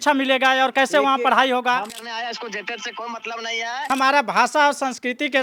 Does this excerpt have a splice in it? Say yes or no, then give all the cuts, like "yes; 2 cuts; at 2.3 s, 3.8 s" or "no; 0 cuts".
yes; 2 cuts; at 1.9 s, 3.9 s